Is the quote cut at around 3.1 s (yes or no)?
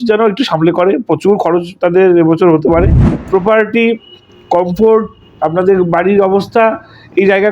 yes